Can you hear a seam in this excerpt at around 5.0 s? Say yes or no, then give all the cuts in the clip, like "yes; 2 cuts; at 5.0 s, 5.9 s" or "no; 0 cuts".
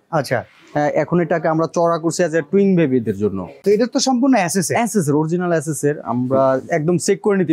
no; 1 cut; at 3.5 s